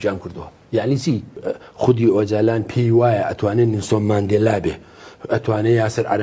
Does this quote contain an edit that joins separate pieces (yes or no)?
yes